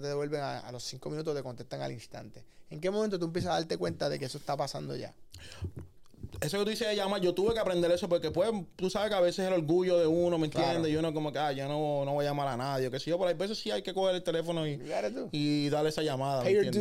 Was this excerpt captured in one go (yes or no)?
yes